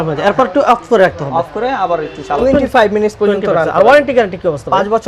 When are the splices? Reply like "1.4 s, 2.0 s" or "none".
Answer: 2.4 s